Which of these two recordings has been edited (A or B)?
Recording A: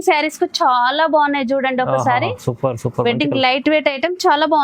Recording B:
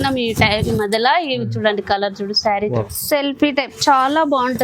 B